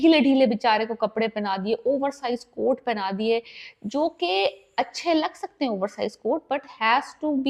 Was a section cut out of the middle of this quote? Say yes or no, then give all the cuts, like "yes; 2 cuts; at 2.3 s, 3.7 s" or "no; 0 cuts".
no; 0 cuts